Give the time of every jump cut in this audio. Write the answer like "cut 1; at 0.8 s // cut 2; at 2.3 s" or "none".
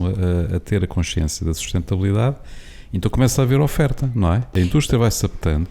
cut 1; at 4.5 s